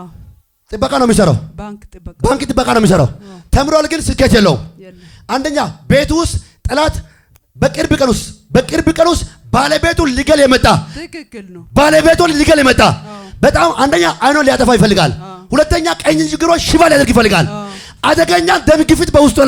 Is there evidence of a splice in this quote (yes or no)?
no